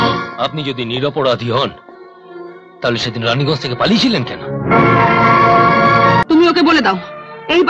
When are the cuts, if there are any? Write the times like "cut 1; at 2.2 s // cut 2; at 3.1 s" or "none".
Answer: cut 1; at 6.2 s